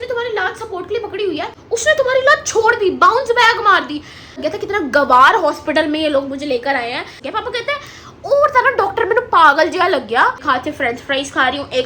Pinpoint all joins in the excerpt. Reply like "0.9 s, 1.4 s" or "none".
1.6 s, 4.4 s, 7.2 s, 10.4 s